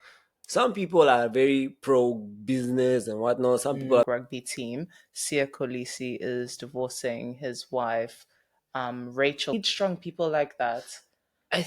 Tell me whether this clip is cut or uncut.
cut